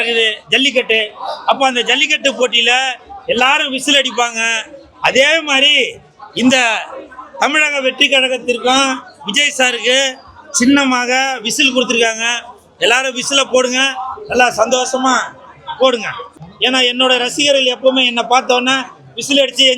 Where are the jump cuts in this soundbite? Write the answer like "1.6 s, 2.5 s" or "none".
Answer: 16.3 s